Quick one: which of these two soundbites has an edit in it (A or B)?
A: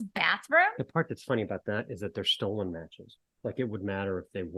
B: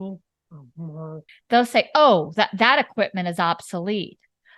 B